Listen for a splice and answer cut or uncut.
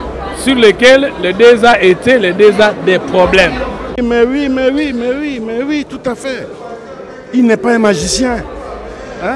cut